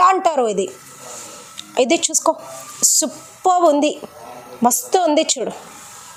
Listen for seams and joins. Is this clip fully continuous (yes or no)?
yes